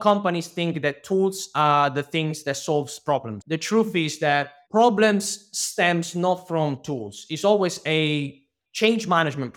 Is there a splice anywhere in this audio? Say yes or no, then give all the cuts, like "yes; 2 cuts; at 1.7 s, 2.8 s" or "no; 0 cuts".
yes; 1 cut; at 3.3 s